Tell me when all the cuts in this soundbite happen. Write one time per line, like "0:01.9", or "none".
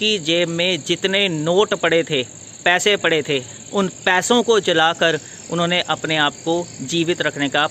0:03.5